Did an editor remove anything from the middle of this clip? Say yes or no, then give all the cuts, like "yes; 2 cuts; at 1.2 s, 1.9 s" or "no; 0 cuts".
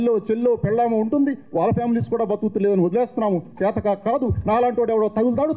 no; 0 cuts